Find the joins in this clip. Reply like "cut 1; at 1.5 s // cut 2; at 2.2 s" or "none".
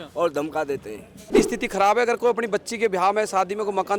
cut 1; at 1.2 s